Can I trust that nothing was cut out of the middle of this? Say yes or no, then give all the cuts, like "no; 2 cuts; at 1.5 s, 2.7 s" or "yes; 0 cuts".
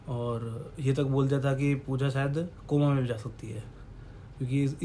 yes; 0 cuts